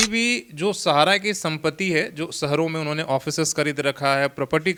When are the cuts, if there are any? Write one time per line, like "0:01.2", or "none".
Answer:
none